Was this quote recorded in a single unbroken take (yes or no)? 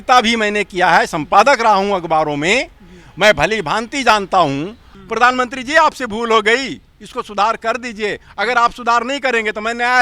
no